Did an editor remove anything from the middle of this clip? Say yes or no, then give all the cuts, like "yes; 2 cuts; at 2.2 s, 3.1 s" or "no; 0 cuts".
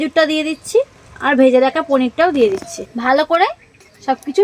yes; 2 cuts; at 1.0 s, 2.8 s